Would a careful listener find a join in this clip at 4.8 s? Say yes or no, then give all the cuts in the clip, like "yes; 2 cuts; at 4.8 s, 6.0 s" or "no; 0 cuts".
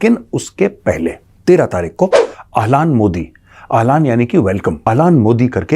yes; 2 cuts; at 1.3 s, 4.8 s